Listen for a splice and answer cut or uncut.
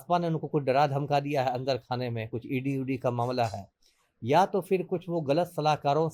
uncut